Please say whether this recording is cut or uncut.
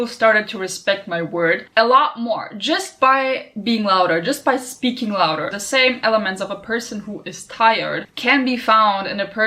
cut